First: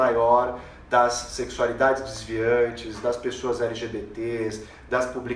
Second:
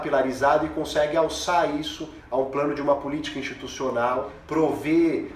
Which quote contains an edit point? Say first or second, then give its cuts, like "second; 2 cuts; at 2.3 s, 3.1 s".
second; 1 cut; at 4.4 s